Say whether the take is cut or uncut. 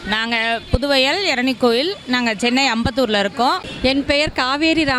cut